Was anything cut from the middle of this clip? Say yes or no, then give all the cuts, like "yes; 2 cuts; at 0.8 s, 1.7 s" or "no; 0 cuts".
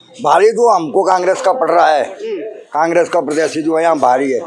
no; 0 cuts